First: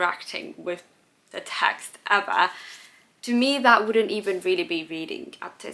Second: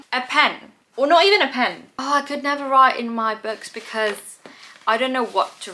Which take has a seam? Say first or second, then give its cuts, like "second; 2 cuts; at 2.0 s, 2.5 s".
second; 1 cut; at 1.9 s